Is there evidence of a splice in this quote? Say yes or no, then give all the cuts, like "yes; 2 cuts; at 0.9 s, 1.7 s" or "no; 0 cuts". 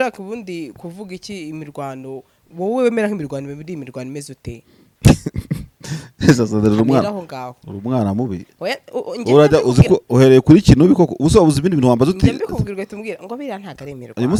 no; 0 cuts